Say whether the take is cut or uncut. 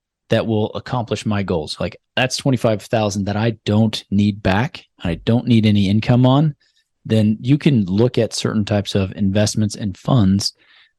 uncut